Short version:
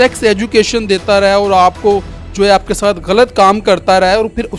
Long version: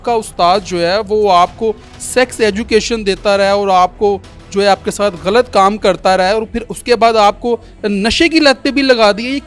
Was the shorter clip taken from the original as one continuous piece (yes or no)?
yes